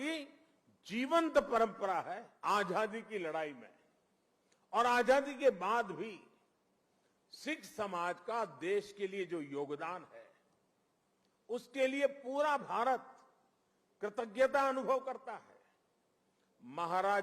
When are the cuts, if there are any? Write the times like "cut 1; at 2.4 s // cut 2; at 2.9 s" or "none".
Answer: cut 1; at 2.3 s